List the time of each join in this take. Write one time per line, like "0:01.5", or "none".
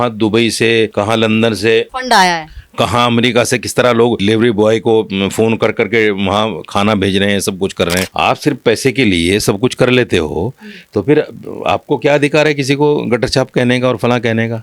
0:00.9
0:01.9
0:04.2
0:08.1